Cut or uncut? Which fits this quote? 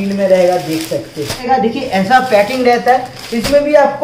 cut